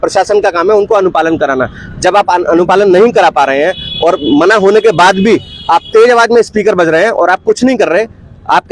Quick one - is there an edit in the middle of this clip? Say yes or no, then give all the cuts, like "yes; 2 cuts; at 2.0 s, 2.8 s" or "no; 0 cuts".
no; 0 cuts